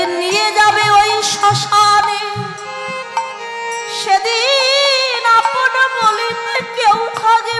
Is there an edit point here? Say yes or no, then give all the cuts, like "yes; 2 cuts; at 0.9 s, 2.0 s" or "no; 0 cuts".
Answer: no; 0 cuts